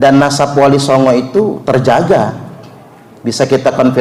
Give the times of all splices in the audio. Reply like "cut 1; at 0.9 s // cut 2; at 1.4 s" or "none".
none

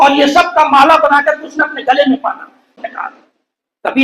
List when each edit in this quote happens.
cut 1; at 2.7 s

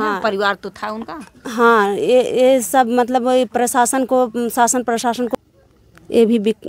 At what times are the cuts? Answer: cut 1; at 5.3 s

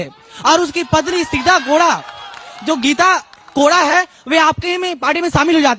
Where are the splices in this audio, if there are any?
none

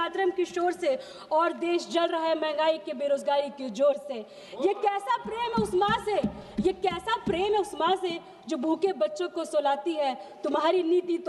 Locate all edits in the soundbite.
none

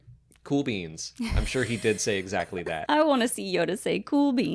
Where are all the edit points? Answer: cut 1; at 2.8 s

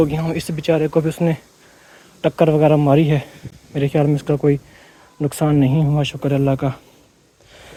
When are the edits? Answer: none

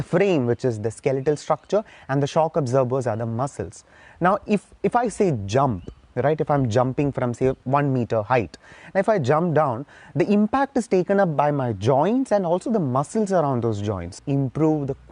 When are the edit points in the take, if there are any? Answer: cut 1; at 7.6 s // cut 2; at 14.2 s

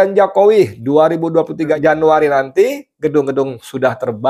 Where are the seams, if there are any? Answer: cut 1; at 1.8 s

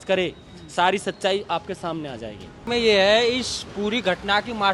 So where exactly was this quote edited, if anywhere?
cut 1; at 2.7 s

